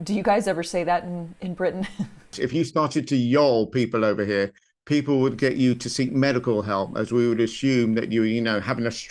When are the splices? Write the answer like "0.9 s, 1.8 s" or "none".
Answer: 2.4 s